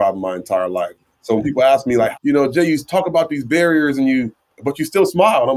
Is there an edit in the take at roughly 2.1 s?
yes; 1 cut; at 2.1 s

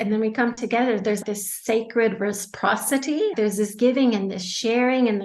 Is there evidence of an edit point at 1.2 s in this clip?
yes; 2 cuts; at 1.2 s, 3.3 s

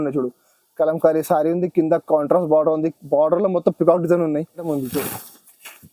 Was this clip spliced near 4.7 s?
yes; 1 cut; at 4.7 s

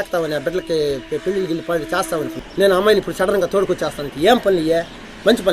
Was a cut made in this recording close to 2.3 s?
yes; 1 cut; at 2.3 s

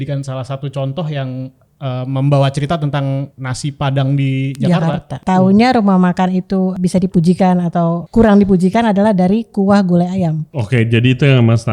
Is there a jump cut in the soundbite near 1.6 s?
no; 5 cuts; at 3.4 s, 5.2 s, 6.7 s, 8.0 s, 10.5 s

